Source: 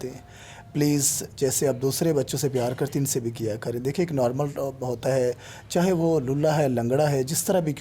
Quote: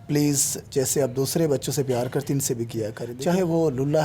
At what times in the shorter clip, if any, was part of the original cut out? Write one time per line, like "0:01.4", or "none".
0:03.1